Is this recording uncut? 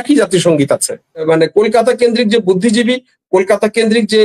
no; 1 cut; at 1.2 s

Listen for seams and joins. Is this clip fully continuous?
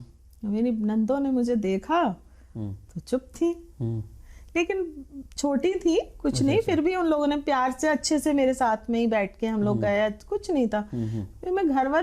yes; 0 cuts

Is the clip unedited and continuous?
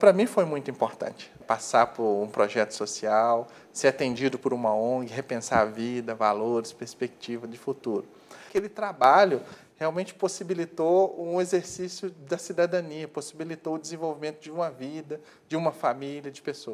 no; 2 cuts; at 1.4 s, 8.4 s

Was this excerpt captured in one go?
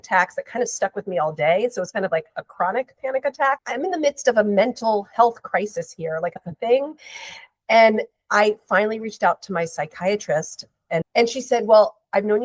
no; 3 cuts; at 3.6 s, 6.4 s, 11.1 s

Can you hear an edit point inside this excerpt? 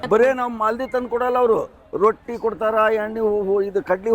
no; 0 cuts

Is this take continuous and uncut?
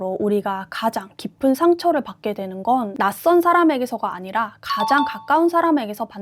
yes; 0 cuts

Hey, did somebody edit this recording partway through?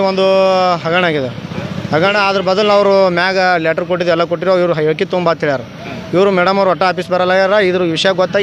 no; 0 cuts

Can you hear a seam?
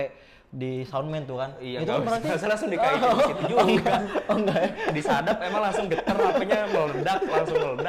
no; 0 cuts

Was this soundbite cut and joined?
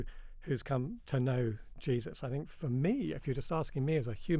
yes; 1 cut; at 1.0 s

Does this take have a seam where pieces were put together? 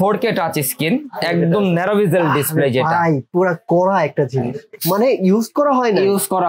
yes; 1 cut; at 4.7 s

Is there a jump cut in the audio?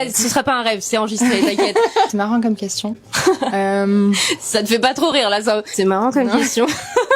yes; 1 cut; at 2.1 s

